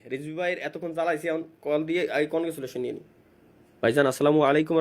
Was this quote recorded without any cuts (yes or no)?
yes